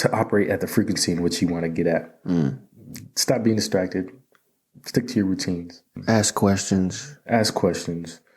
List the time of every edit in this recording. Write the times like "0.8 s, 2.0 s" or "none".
5.9 s